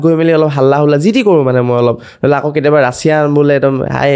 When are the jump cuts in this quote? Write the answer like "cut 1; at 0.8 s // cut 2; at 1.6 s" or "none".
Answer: none